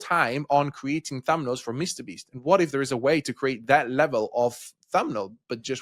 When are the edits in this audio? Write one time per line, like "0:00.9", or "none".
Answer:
none

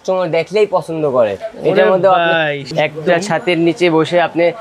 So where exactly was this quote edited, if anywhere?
0:02.7

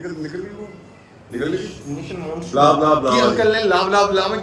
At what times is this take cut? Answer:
none

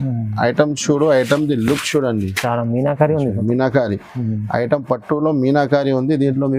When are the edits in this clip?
none

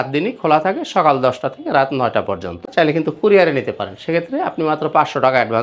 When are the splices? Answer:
0:02.6

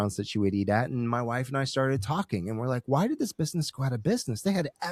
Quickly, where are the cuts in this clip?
none

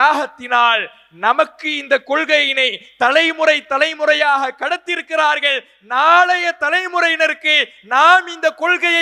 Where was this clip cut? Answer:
none

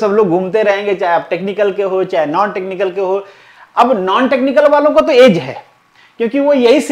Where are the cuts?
none

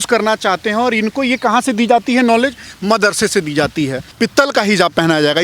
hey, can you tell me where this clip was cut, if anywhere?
0:04.1

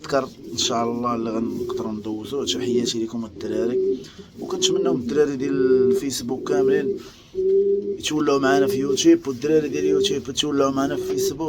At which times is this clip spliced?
none

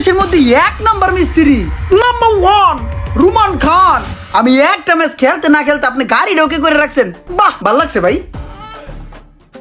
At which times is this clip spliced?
none

